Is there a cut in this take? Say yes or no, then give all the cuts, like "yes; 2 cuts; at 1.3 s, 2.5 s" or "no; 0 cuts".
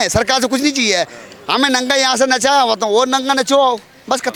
no; 0 cuts